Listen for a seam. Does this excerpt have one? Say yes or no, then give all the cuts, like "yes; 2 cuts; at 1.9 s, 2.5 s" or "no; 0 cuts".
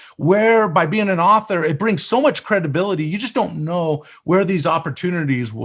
no; 0 cuts